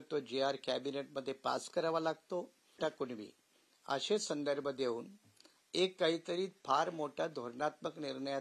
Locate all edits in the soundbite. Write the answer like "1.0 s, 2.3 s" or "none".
2.8 s